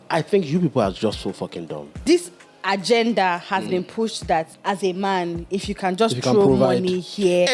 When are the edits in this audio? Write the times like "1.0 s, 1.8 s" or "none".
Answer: 2.0 s, 4.5 s